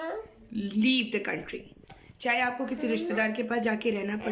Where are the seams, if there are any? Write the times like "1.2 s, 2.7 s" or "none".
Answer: none